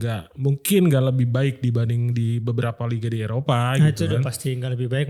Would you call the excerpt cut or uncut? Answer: uncut